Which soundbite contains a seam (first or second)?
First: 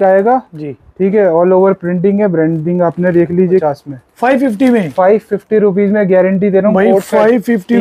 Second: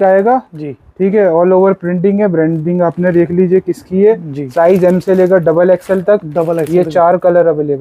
first